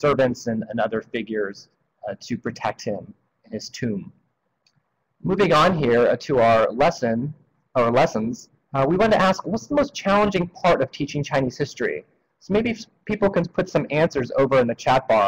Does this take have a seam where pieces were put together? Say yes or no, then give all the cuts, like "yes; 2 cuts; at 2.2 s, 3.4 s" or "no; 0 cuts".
yes; 1 cut; at 3.7 s